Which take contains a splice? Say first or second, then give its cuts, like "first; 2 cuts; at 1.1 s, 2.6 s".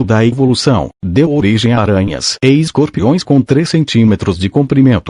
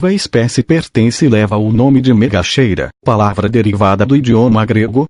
first; 2 cuts; at 1.9 s, 3.2 s